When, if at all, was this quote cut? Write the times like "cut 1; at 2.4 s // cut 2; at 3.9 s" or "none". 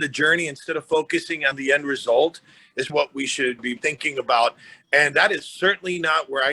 cut 1; at 1.6 s // cut 2; at 2.9 s